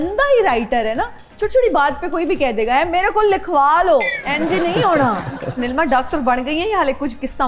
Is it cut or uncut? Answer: cut